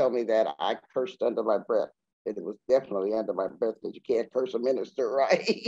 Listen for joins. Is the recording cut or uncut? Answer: uncut